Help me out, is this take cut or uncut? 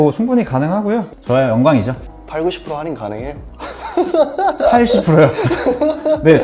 cut